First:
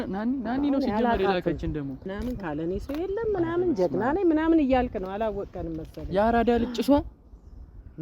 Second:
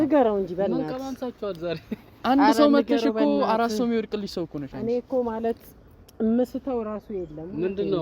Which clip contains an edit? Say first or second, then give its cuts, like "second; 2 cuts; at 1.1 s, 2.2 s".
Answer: first; 1 cut; at 2.1 s